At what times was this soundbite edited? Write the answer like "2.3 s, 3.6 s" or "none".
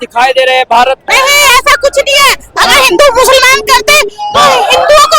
1.0 s